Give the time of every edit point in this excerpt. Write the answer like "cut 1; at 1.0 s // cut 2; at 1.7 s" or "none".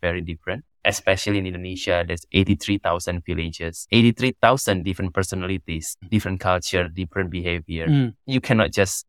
none